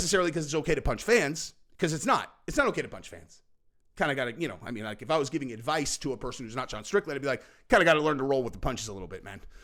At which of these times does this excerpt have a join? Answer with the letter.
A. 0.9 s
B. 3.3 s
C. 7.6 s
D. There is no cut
D